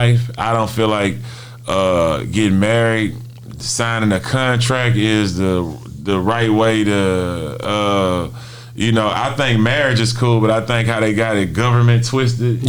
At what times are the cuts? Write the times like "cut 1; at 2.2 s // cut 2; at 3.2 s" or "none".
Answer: none